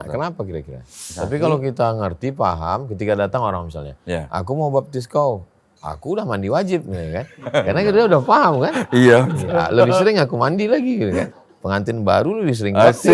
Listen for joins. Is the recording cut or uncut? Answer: cut